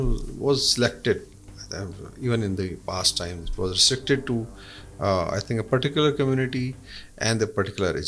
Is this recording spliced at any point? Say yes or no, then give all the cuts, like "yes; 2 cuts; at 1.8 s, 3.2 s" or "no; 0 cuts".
no; 0 cuts